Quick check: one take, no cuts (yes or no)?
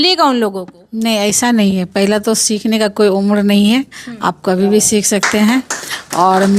yes